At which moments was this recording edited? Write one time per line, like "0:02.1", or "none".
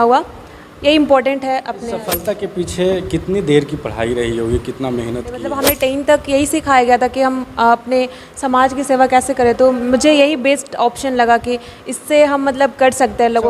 0:02.1
0:05.5